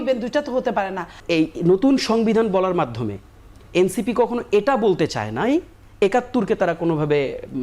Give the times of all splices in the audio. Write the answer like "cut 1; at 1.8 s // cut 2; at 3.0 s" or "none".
cut 1; at 1.2 s // cut 2; at 5.8 s